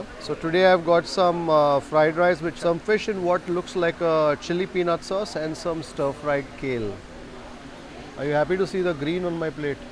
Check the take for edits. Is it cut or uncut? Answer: cut